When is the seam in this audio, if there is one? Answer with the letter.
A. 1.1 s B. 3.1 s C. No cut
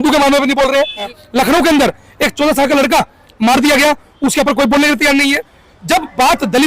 A